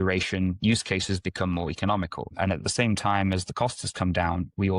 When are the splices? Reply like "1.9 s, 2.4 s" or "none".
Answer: 2.2 s